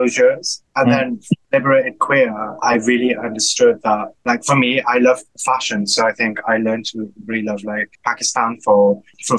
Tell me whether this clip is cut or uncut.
cut